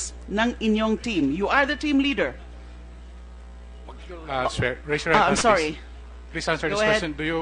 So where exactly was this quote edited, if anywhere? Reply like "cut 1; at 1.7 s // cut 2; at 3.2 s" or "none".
cut 1; at 5.5 s

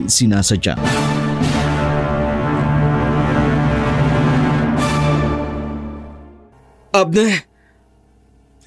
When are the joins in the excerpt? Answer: cut 1; at 6.6 s

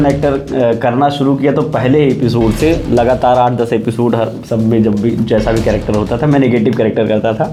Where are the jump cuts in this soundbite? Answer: none

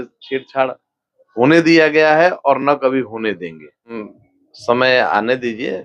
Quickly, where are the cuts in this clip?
cut 1; at 4.0 s

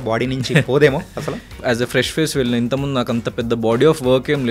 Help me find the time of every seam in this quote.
cut 1; at 1.6 s

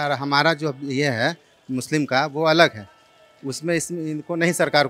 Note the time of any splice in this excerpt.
none

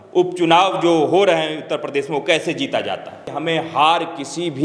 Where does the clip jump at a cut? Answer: cut 1; at 3.2 s

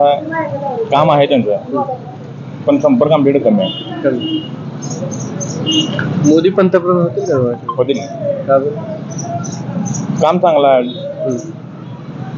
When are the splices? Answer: none

